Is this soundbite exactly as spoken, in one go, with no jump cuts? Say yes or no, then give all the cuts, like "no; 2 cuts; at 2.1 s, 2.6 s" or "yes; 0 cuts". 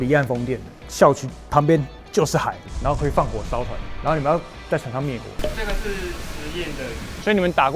no; 2 cuts; at 2.6 s, 5.3 s